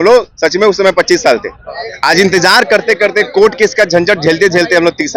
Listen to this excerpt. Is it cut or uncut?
uncut